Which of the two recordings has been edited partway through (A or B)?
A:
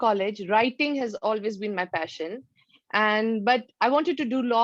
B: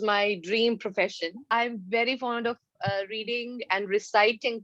B